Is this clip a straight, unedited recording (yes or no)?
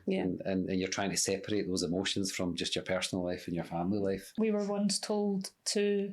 no